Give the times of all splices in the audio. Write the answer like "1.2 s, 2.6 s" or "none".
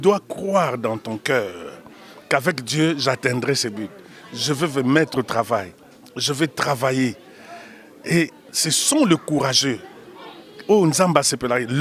none